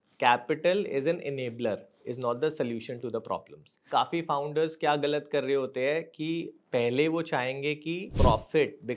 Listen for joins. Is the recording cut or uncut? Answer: cut